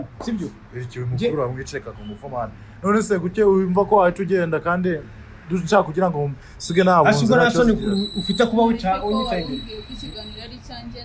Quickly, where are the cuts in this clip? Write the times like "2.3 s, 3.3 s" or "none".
none

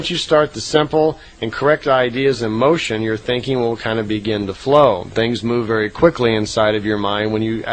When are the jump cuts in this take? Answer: none

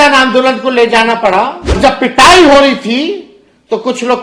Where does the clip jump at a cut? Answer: 1.8 s

